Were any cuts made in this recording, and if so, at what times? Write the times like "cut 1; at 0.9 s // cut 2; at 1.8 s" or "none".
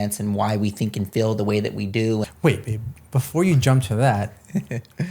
cut 1; at 2.3 s